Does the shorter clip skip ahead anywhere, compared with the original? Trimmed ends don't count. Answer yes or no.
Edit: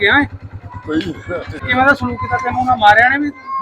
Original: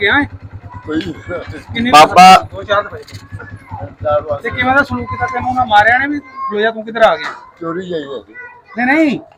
yes